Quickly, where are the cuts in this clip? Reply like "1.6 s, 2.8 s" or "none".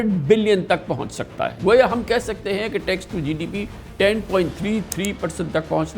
1.6 s